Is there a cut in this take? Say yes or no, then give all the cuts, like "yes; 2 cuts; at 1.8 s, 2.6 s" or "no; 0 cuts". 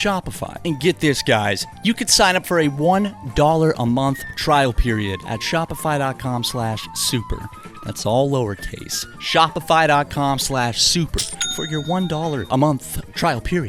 no; 0 cuts